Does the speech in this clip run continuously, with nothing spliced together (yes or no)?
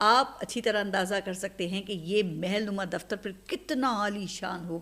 yes